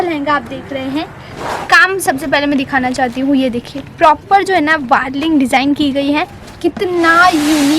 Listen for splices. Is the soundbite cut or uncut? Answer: cut